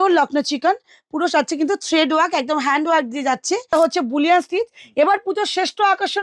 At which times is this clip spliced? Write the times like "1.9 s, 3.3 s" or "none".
3.7 s